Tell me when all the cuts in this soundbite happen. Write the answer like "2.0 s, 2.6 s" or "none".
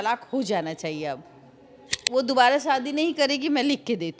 1.9 s